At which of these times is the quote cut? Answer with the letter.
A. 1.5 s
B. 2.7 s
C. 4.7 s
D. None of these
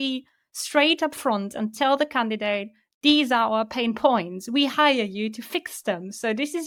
D